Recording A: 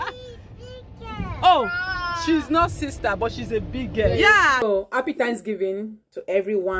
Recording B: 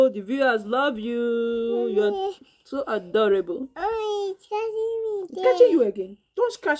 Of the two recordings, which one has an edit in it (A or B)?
A